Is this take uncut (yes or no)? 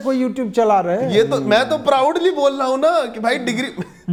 yes